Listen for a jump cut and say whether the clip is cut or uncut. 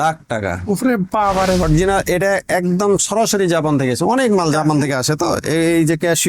cut